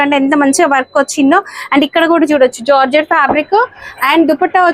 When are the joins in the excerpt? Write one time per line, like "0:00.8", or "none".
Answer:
none